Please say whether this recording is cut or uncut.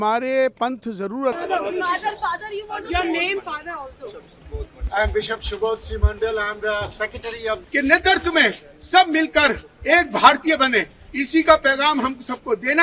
cut